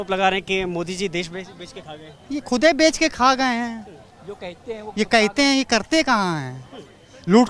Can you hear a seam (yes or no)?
no